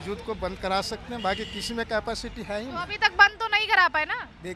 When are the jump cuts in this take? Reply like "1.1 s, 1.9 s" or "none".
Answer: none